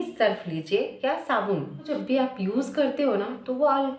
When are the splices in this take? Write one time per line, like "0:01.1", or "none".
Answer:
0:01.9